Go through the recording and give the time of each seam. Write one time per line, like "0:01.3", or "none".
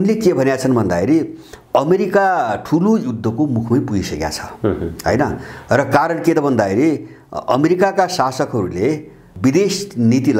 none